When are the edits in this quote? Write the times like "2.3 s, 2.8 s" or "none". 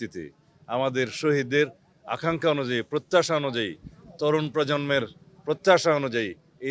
none

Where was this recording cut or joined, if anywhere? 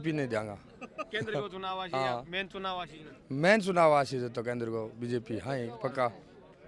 none

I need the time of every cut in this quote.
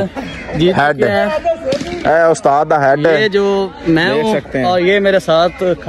1.9 s

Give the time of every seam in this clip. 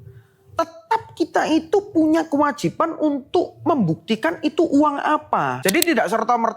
5.5 s

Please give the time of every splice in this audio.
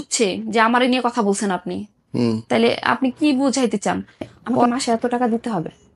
4.6 s

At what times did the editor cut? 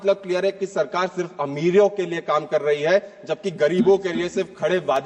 none

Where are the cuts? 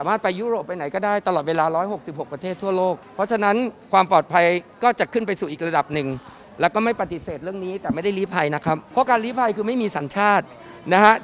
3.1 s, 8.9 s

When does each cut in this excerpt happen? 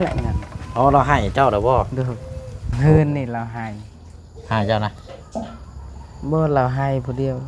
2.7 s

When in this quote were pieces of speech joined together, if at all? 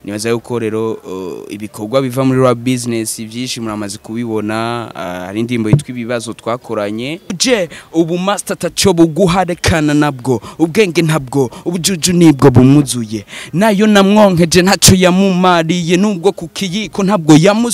7.4 s

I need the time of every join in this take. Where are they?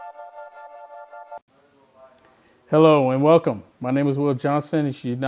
none

